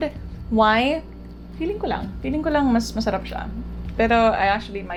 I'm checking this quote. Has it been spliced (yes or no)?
no